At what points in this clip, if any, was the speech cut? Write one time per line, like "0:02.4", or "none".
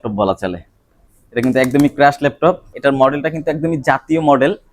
0:02.7